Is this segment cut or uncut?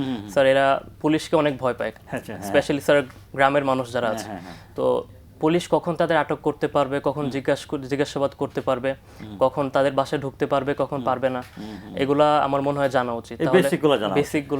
uncut